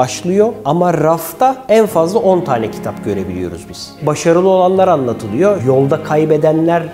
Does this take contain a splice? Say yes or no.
yes